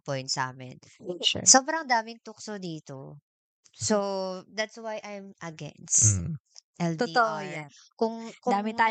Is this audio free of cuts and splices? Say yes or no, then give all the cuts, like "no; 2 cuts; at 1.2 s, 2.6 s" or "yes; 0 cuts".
yes; 0 cuts